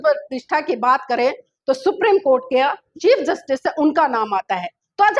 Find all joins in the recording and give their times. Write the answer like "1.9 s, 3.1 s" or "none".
2.9 s